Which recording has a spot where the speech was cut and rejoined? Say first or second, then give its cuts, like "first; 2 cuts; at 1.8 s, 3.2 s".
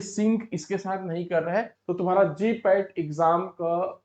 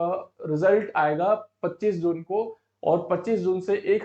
first; 1 cut; at 1.8 s